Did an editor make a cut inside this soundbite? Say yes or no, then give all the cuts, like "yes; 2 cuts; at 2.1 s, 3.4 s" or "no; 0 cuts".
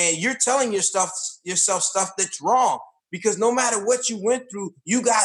no; 0 cuts